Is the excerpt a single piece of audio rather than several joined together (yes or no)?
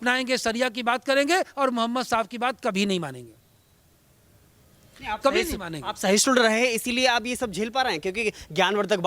yes